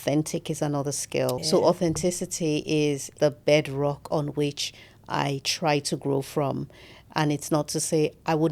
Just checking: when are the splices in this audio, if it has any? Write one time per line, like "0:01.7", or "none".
0:01.4
0:03.1